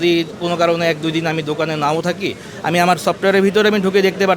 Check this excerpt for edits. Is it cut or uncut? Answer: uncut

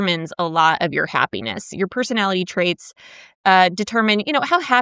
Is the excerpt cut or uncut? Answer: uncut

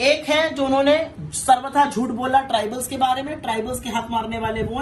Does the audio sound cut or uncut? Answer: uncut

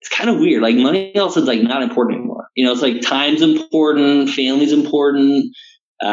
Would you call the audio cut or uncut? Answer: cut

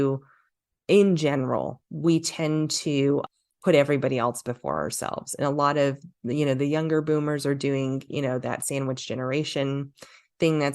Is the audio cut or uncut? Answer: cut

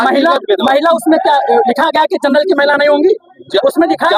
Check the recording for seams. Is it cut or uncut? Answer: uncut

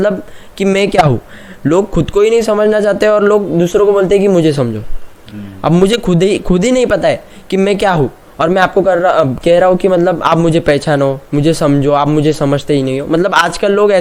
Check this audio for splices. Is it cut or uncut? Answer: uncut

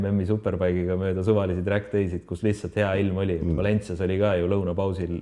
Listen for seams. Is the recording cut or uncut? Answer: uncut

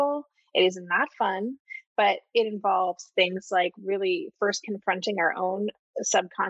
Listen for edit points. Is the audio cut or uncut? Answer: uncut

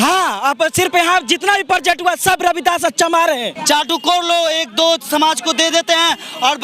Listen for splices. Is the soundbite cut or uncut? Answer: cut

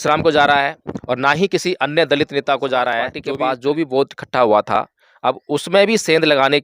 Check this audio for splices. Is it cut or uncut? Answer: cut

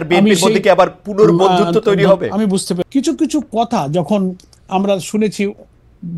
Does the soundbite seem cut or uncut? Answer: cut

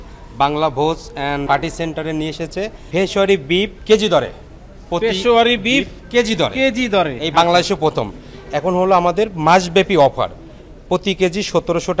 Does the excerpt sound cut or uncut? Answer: cut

